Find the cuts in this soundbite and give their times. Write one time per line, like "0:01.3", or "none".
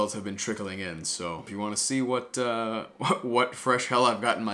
none